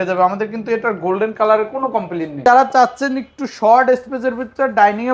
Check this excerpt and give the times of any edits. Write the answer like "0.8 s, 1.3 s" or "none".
2.4 s